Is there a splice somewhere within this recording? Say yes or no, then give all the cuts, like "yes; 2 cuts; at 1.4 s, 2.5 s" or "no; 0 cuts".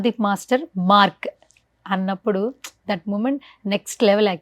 no; 0 cuts